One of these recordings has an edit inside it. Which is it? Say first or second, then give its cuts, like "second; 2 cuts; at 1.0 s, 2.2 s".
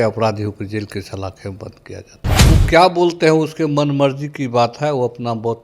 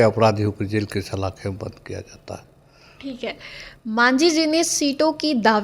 first; 1 cut; at 2.5 s